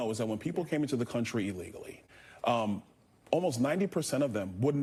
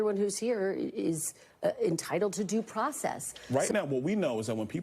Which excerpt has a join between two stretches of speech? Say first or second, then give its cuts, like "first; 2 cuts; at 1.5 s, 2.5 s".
second; 1 cut; at 3.3 s